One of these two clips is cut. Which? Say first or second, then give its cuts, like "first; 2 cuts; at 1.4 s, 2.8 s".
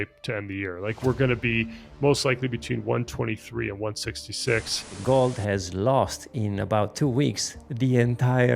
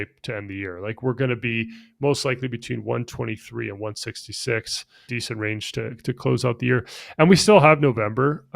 first; 1 cut; at 5.0 s